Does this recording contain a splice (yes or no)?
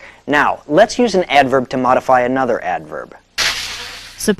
no